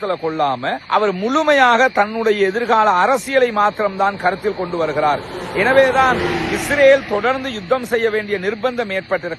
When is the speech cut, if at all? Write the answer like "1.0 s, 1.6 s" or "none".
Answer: none